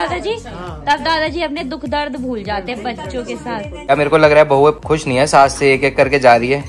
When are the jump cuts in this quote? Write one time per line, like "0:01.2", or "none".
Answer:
0:03.9
0:04.8